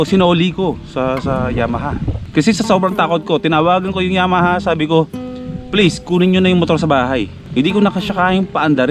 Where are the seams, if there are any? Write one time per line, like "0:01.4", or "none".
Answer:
0:02.2